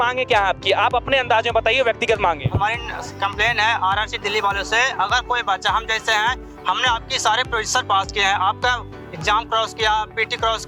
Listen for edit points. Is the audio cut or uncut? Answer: uncut